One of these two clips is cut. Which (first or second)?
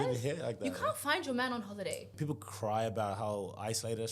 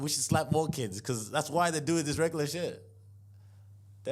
first